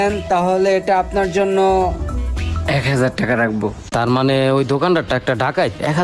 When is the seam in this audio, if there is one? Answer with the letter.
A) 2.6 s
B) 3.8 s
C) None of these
B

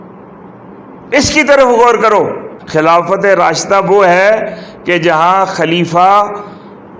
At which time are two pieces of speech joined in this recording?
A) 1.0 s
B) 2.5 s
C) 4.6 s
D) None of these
B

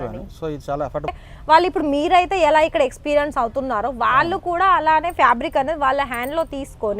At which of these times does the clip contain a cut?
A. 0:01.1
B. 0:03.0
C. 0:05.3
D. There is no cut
A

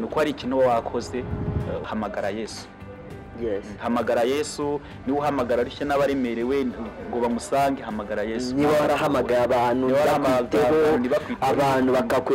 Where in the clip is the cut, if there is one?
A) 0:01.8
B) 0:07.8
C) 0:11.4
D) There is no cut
A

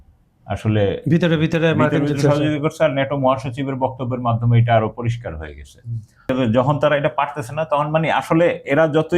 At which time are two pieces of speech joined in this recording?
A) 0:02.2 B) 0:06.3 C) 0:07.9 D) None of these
B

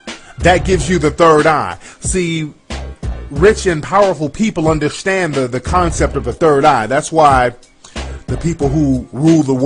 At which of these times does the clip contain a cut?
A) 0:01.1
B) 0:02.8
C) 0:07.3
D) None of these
A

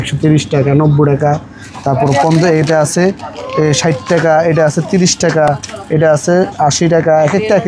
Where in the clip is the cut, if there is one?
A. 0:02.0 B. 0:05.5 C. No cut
C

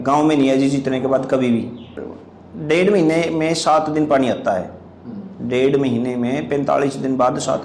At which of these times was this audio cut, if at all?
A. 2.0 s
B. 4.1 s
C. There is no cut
A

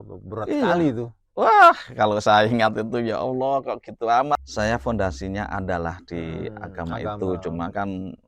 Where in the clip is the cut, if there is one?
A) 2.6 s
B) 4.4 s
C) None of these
B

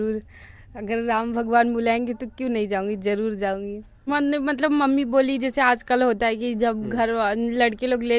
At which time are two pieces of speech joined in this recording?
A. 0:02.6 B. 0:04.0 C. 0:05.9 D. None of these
B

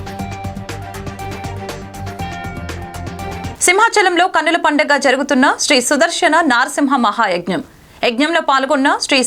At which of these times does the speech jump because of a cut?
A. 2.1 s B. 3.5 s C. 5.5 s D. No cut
B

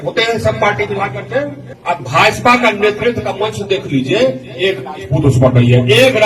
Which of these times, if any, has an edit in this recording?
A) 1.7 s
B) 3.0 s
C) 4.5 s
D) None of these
A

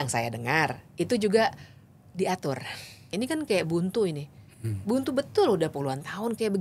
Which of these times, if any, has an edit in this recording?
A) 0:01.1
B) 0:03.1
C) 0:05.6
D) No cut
B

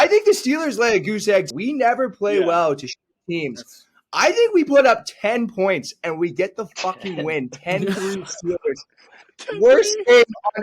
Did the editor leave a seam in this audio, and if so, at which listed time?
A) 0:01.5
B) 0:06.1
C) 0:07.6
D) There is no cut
A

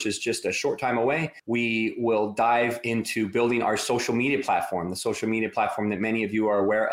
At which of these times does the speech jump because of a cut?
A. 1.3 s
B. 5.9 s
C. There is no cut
A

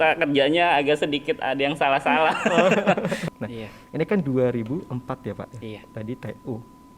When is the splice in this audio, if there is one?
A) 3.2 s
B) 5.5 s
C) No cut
A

